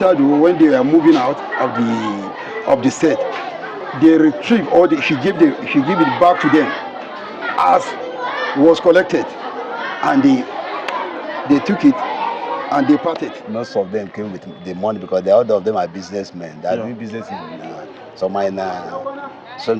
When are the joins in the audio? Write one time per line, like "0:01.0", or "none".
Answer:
0:13.3